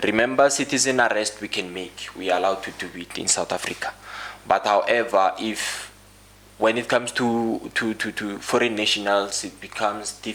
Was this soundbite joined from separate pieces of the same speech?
no; 0 cuts

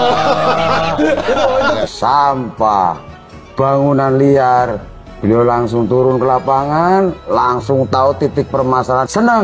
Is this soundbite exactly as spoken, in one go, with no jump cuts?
no; 1 cut; at 1.9 s

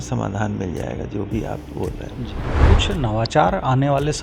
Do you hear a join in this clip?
yes; 1 cut; at 2.6 s

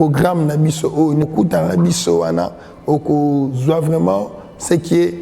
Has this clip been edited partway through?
yes; 1 cut; at 1.2 s

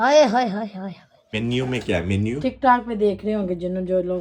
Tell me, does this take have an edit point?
yes; 1 cut; at 1.3 s

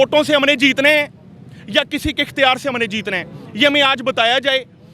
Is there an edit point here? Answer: no; 0 cuts

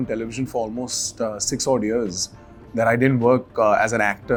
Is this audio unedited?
yes; 0 cuts

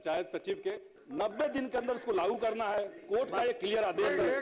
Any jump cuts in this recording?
yes; 1 cut; at 0.9 s

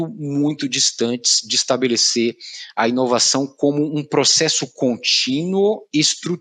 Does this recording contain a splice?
no; 0 cuts

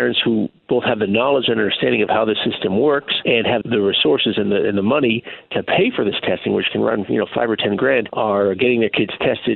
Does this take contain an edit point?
no; 0 cuts

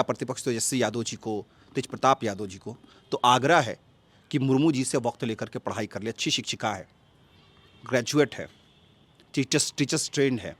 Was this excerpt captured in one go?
yes; 0 cuts

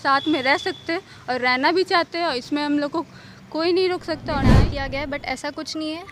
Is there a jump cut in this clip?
yes; 1 cut; at 4.4 s

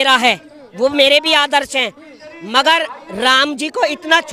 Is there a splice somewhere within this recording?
no; 0 cuts

